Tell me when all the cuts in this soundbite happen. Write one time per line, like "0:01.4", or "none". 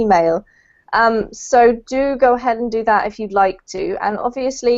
0:01.8